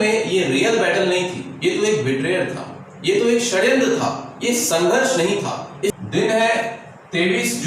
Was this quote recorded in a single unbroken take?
no; 1 cut; at 5.9 s

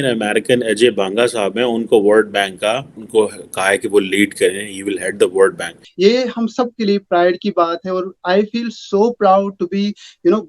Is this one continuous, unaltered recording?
no; 2 cuts; at 2.9 s, 5.8 s

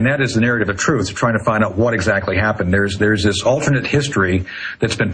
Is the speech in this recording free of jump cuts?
no; 1 cut; at 1.9 s

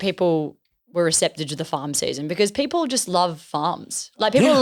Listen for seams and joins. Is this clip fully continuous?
yes; 0 cuts

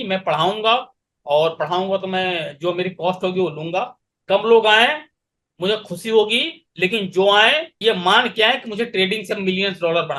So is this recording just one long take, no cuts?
yes; 0 cuts

